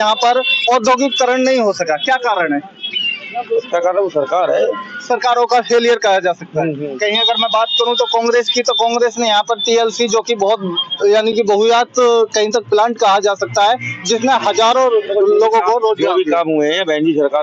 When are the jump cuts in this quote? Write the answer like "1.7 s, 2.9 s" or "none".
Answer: none